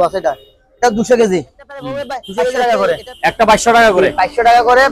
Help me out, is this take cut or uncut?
cut